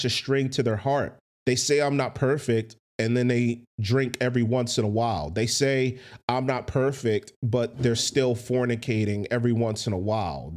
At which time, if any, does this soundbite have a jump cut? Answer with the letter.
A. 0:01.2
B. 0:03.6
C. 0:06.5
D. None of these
A